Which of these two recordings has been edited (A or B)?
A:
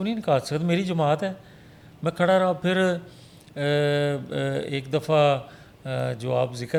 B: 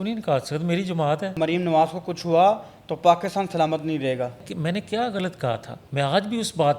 B